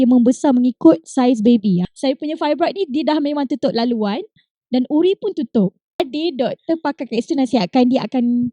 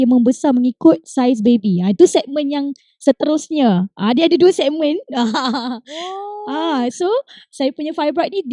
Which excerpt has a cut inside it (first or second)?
first